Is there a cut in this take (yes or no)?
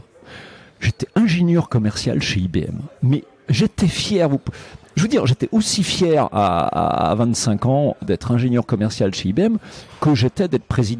no